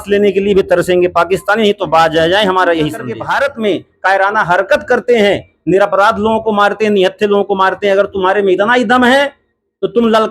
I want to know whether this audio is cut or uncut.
cut